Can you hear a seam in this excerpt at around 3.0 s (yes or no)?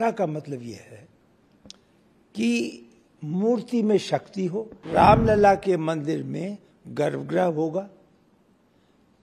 no